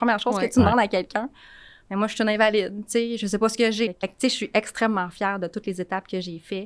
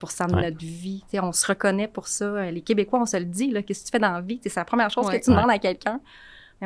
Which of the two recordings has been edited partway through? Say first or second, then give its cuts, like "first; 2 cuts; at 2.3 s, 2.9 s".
first; 1 cut; at 3.9 s